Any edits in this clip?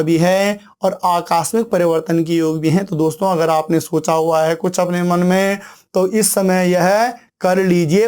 no; 0 cuts

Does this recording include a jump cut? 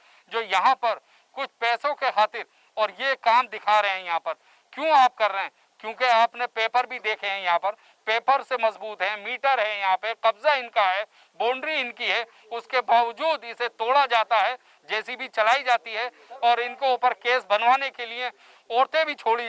no; 0 cuts

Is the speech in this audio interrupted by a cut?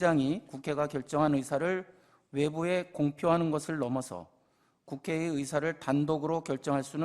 no; 0 cuts

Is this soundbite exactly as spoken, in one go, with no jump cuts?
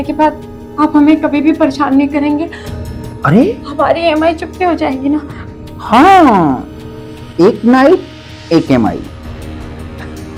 yes; 0 cuts

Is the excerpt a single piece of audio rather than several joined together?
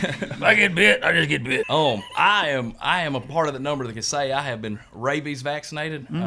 no; 1 cut; at 1.7 s

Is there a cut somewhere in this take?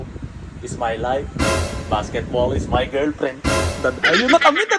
no; 0 cuts

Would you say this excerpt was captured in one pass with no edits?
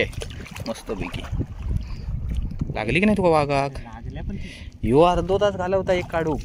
no; 1 cut; at 2.6 s

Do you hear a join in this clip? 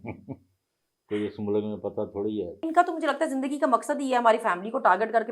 yes; 1 cut; at 2.6 s

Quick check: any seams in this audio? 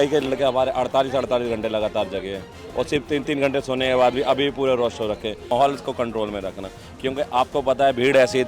yes; 1 cut; at 5.5 s

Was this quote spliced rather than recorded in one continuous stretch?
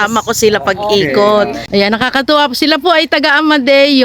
yes; 1 cut; at 1.6 s

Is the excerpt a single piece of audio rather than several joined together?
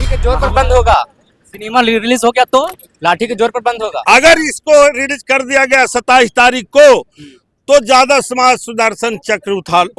no; 1 cut; at 4.0 s

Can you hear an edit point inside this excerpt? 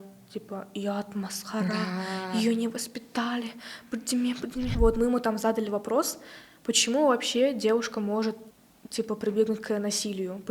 yes; 2 cuts; at 4.7 s, 8.5 s

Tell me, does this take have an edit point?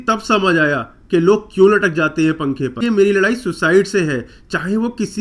yes; 1 cut; at 2.8 s

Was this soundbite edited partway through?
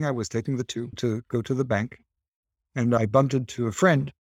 yes; 2 cuts; at 0.9 s, 3.0 s

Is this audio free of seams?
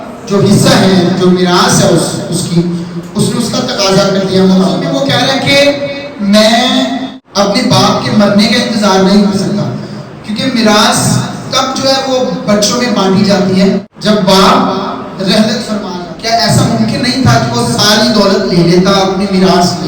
no; 4 cuts; at 4.8 s, 7.2 s, 13.9 s, 15.9 s

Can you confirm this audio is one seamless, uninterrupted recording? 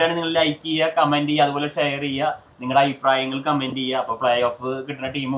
yes; 0 cuts

